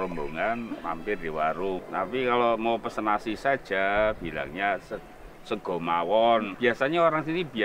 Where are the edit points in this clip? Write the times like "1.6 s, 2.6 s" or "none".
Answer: 1.8 s, 6.5 s